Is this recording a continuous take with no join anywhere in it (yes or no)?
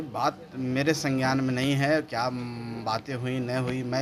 yes